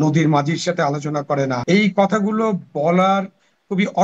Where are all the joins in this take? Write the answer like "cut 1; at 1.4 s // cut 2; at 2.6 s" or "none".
cut 1; at 1.6 s